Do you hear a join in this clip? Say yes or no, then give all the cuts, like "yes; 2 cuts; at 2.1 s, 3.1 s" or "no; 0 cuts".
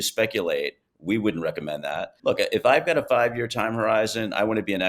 yes; 1 cut; at 2.1 s